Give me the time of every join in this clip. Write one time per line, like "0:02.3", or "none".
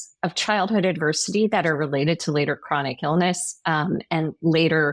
none